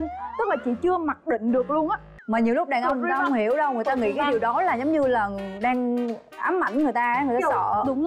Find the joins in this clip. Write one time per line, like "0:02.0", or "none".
0:02.1